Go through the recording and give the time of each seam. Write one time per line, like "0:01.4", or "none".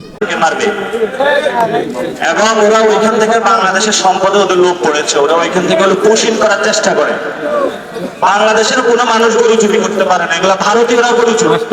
none